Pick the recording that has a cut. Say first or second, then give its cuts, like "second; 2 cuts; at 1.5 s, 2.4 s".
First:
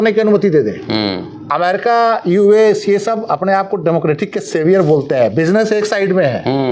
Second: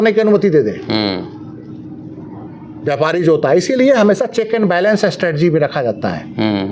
first; 1 cut; at 1.5 s